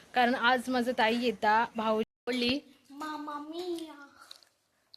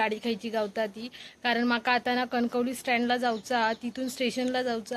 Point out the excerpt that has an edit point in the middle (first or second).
first